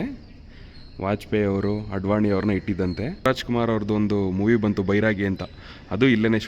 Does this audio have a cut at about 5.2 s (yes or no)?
no